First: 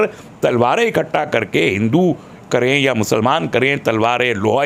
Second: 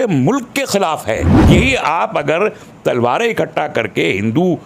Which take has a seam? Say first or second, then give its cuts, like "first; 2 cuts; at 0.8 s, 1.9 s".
second; 1 cut; at 1.3 s